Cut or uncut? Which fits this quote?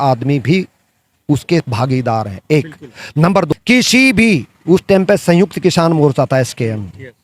cut